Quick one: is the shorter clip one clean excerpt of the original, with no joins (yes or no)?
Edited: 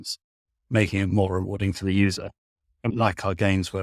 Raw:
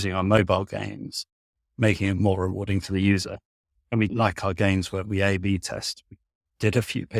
no